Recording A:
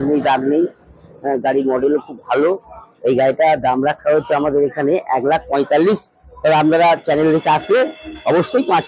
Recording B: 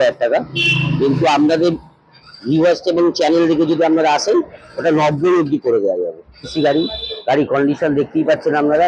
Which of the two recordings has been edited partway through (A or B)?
B